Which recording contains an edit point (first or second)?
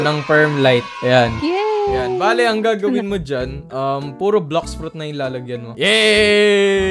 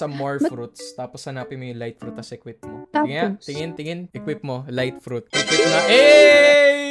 second